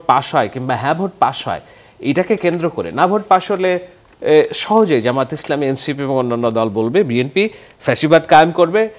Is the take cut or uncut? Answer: uncut